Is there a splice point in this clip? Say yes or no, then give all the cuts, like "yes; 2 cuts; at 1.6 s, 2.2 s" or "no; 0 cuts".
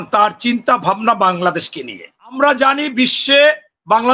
yes; 1 cut; at 2.4 s